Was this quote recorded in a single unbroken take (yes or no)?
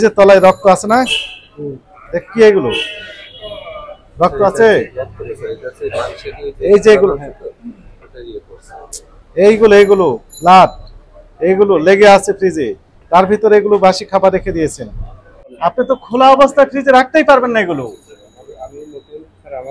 no